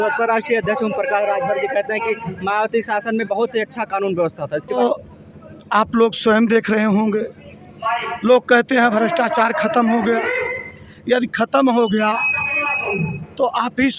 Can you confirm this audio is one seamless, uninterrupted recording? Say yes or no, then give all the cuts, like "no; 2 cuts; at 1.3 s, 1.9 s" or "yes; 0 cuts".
no; 1 cut; at 4.8 s